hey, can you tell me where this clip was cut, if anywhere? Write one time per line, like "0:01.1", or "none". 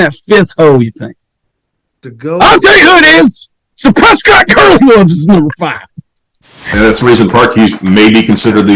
0:01.9
0:06.7